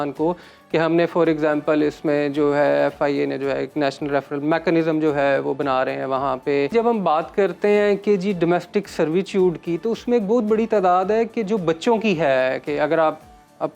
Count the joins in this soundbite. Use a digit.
1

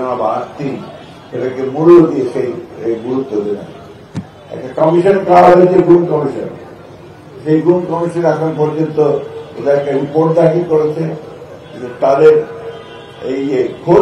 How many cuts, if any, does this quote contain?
0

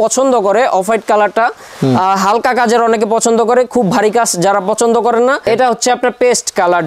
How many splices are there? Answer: 1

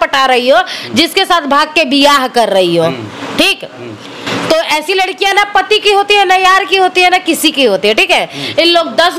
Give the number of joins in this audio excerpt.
0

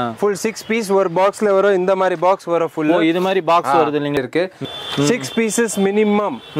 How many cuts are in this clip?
1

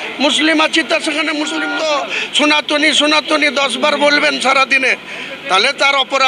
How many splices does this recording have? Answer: 1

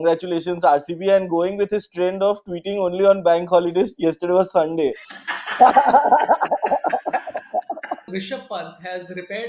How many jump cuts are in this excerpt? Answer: 1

